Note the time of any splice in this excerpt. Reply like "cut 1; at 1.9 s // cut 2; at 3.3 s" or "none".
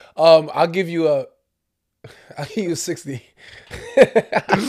none